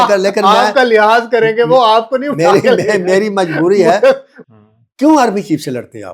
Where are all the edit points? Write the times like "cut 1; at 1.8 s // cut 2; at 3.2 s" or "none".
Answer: cut 1; at 4.3 s